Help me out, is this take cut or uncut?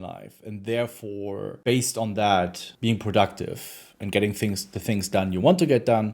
cut